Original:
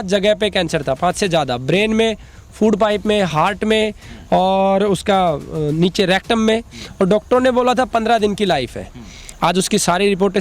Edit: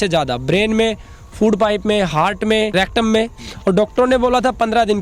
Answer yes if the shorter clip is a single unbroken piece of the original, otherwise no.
no